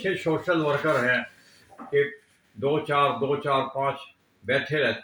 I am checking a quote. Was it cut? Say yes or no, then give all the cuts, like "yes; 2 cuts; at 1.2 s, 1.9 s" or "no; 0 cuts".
no; 0 cuts